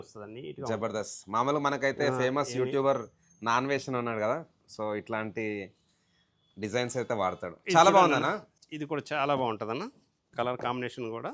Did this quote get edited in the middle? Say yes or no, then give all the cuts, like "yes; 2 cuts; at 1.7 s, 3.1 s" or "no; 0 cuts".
no; 0 cuts